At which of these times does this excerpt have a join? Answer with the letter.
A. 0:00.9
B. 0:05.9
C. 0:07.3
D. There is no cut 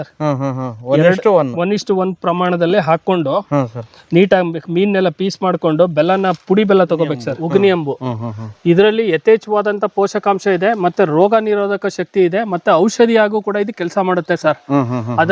C